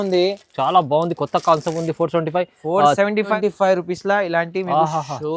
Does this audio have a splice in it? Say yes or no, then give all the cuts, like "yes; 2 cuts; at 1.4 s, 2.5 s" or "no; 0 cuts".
yes; 1 cut; at 3.3 s